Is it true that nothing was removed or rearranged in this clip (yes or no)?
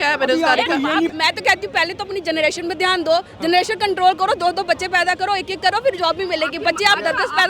no